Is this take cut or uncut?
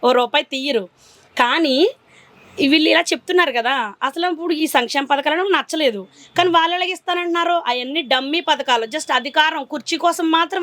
uncut